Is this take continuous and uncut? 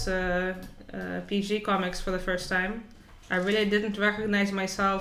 yes; 0 cuts

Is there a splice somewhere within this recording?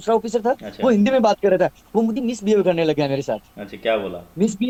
no; 0 cuts

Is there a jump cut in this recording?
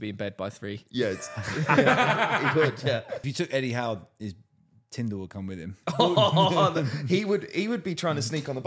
yes; 1 cut; at 3.2 s

